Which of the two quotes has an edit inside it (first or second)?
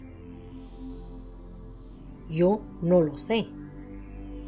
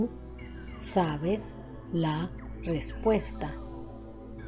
second